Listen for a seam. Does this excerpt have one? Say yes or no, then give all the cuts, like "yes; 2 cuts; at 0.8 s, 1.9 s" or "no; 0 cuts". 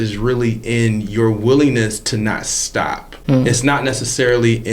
yes; 1 cut; at 3.1 s